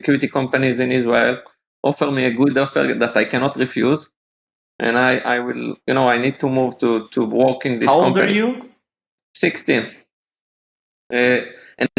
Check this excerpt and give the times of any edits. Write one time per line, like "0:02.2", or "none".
0:09.2